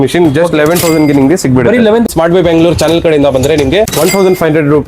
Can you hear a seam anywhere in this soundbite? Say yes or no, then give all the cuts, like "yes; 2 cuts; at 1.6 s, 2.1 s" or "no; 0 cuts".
yes; 2 cuts; at 2.1 s, 3.9 s